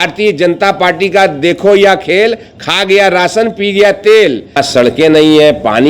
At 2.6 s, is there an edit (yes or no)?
no